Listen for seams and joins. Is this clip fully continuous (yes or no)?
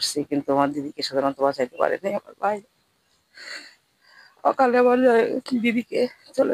yes